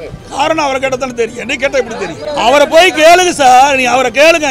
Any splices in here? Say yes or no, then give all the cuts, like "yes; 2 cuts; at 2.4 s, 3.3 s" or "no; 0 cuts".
yes; 1 cut; at 2.2 s